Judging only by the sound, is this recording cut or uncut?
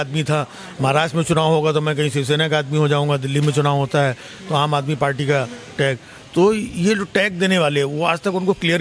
uncut